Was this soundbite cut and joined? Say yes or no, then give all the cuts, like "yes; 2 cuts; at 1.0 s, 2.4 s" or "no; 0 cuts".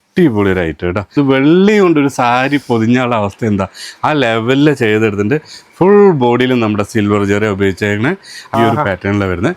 yes; 2 cuts; at 1.1 s, 8.5 s